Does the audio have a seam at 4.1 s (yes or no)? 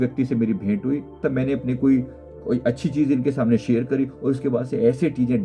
no